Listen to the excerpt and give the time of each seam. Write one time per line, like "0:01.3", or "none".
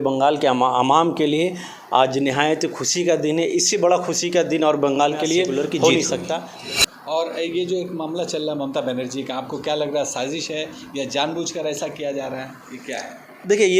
0:06.5